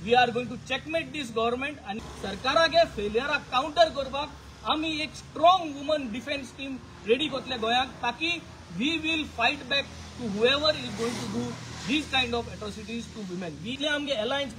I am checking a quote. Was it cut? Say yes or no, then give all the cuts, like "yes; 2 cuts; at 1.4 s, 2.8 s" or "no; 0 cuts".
yes; 2 cuts; at 2.0 s, 13.8 s